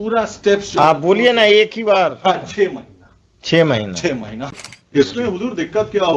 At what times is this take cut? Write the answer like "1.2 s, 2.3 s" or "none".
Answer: 4.4 s